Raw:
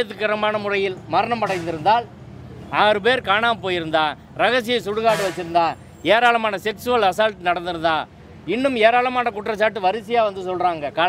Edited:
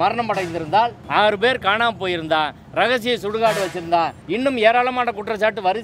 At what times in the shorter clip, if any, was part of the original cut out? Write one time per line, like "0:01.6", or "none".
0:01.0
0:04.2